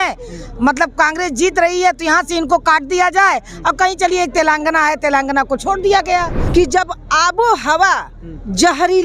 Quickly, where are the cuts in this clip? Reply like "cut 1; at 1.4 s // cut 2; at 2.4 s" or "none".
cut 1; at 6.4 s